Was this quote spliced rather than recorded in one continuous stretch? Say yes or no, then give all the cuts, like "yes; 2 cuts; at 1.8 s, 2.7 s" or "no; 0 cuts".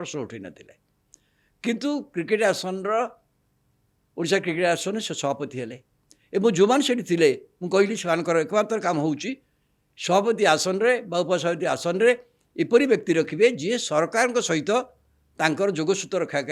no; 0 cuts